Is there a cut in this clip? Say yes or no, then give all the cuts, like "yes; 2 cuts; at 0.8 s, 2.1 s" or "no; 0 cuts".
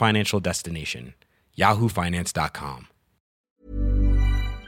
yes; 1 cut; at 3.4 s